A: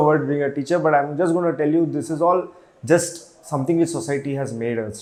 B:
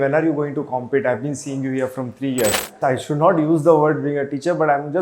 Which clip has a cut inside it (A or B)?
B